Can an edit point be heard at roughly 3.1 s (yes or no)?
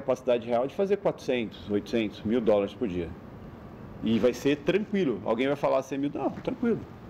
no